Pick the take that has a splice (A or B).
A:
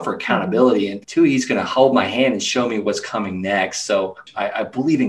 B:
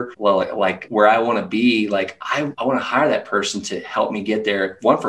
A